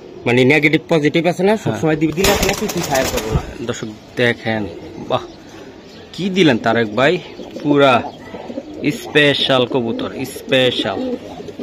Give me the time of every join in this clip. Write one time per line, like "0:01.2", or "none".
none